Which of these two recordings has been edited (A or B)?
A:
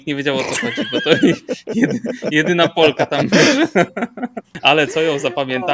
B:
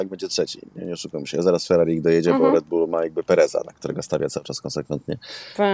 A